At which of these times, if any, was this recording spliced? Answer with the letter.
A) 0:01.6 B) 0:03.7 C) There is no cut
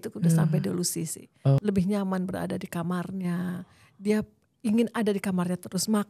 A